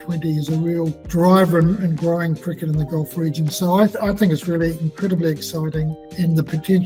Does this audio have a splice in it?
no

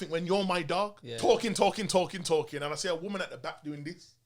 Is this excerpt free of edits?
no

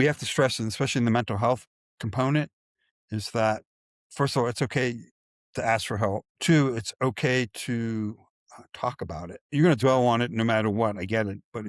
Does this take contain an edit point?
yes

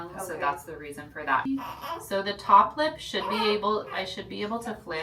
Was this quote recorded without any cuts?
no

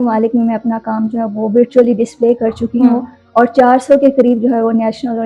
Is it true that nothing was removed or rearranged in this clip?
yes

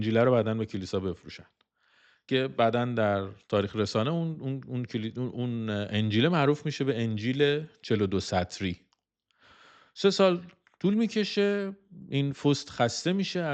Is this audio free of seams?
yes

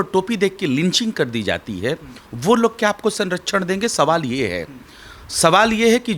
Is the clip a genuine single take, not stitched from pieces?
yes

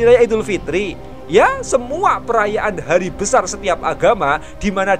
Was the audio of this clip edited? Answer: no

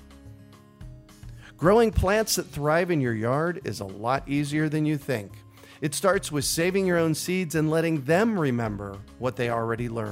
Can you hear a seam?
yes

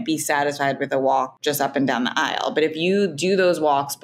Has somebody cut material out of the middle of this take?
yes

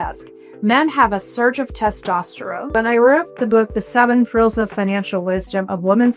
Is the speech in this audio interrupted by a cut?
yes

